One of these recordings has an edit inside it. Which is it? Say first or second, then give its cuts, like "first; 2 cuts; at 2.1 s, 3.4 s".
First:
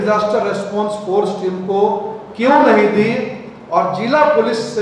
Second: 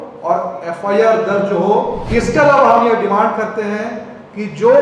second; 1 cut; at 2.0 s